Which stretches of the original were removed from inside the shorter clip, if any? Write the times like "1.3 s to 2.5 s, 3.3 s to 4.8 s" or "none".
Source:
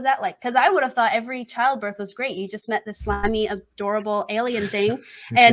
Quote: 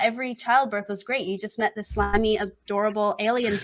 none